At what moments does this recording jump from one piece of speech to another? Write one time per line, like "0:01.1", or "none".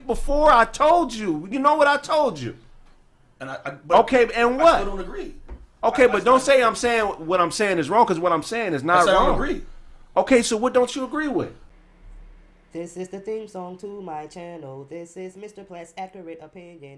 0:11.6